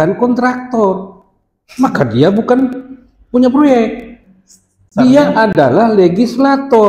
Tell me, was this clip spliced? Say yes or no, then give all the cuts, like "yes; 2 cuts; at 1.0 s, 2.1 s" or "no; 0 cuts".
no; 0 cuts